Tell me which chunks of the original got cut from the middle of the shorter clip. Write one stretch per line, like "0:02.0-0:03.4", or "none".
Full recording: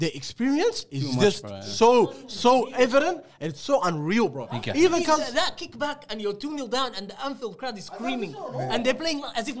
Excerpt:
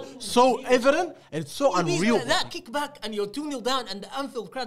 0:04.3-0:05.3